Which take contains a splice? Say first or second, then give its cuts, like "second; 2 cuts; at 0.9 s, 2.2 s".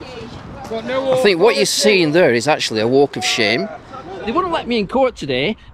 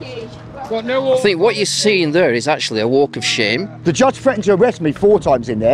second; 1 cut; at 3.7 s